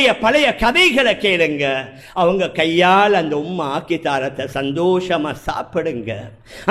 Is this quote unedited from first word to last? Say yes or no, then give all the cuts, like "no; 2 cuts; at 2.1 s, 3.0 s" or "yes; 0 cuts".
yes; 0 cuts